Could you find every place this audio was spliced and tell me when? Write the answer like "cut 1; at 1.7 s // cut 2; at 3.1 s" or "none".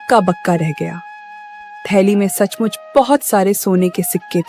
none